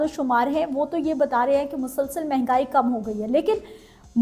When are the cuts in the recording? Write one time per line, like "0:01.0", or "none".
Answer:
none